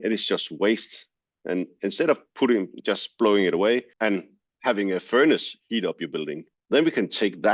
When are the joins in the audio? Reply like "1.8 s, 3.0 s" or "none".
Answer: 3.9 s